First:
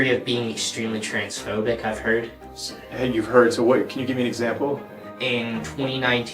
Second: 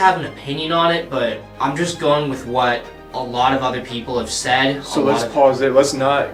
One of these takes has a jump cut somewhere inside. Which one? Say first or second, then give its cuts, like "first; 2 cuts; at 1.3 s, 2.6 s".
first; 1 cut; at 5.0 s